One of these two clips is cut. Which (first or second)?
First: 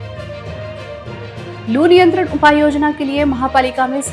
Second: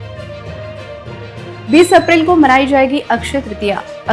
first